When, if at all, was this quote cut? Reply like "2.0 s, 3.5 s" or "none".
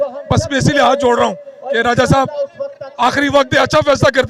none